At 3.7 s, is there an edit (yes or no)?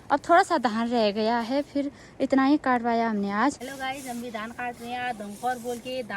yes